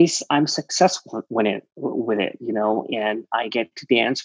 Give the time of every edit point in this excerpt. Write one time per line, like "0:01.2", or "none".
none